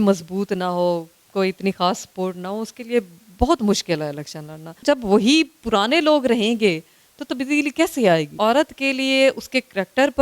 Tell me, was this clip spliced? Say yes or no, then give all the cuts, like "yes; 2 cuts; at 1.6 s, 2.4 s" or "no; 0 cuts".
yes; 2 cuts; at 4.7 s, 8.3 s